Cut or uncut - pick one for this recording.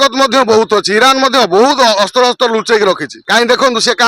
cut